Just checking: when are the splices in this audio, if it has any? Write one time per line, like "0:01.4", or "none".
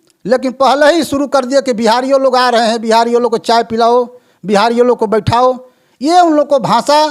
none